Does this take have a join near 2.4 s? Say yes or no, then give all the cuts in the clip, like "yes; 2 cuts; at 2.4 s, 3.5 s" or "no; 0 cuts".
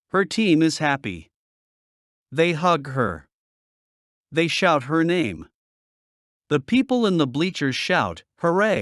no; 1 cut; at 7.5 s